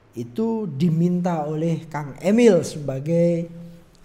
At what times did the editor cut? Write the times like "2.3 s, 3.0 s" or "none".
none